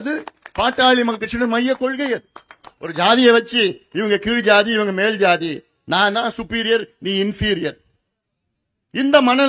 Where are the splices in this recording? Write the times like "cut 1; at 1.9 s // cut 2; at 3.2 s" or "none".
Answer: none